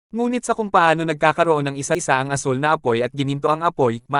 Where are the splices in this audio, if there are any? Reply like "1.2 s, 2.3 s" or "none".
2.0 s